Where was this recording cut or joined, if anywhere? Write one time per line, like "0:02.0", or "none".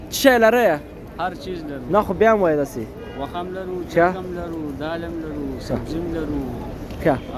none